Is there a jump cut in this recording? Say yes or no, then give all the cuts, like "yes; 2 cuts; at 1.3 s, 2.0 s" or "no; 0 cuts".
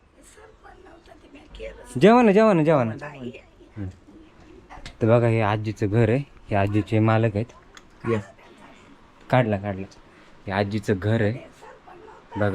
yes; 1 cut; at 4.8 s